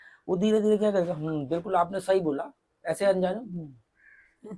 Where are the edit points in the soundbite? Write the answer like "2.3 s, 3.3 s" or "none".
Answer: none